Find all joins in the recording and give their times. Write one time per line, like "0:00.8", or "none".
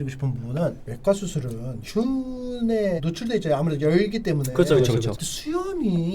0:05.2